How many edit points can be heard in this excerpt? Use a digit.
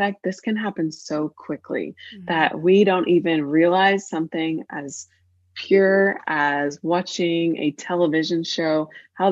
0